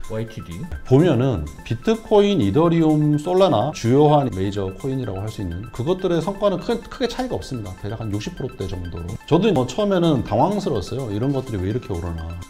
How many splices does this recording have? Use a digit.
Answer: 1